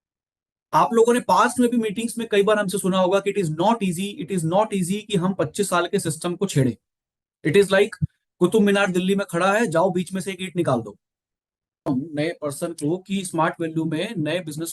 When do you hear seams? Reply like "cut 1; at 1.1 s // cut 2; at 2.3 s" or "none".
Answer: cut 1; at 11.9 s